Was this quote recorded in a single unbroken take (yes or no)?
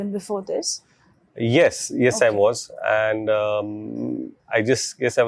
yes